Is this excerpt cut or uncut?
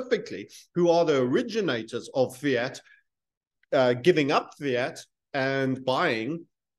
uncut